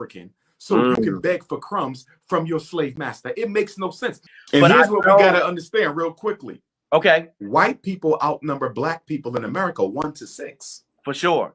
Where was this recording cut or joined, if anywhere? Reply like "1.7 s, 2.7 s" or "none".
4.3 s